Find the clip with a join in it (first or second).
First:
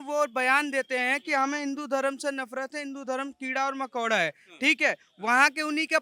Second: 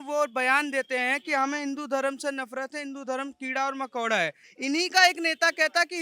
second